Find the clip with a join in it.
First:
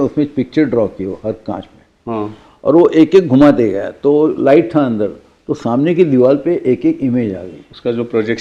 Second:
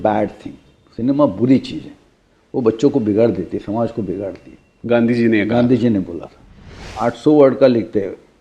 second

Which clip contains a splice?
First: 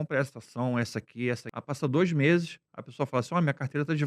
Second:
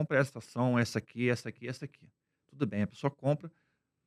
first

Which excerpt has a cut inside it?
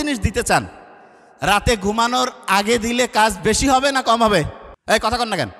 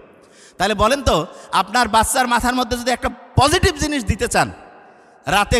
first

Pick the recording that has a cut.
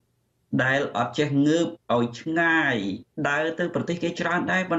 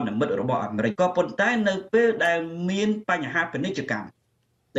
second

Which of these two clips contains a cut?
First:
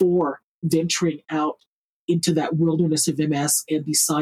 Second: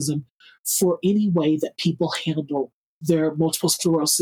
first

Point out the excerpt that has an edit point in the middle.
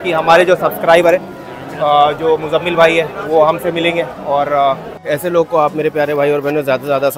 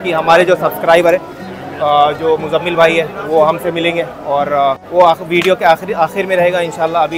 first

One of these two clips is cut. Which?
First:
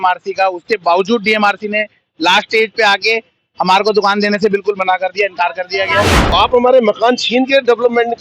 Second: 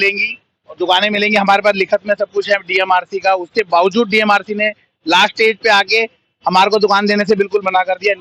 first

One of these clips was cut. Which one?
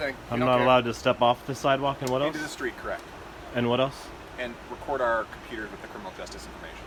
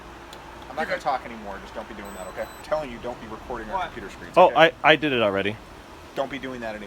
second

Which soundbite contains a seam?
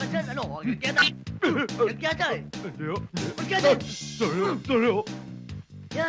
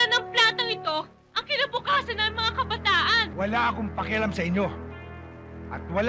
second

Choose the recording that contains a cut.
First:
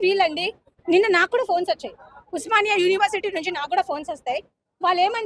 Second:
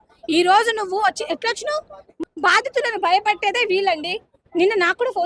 second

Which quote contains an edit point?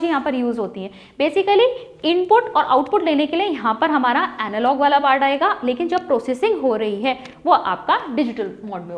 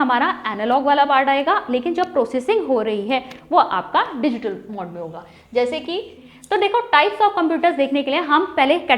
second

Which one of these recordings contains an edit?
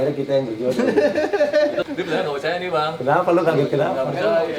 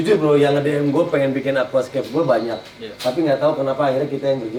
first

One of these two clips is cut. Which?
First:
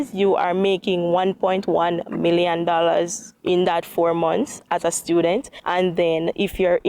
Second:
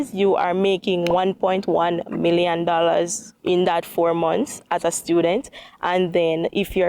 first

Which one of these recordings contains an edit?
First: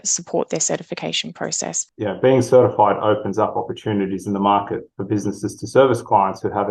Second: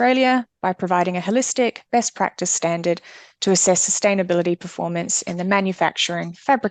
first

